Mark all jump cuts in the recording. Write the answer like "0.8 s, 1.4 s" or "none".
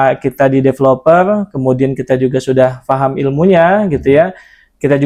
none